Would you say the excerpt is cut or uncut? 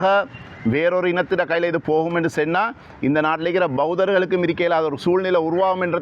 uncut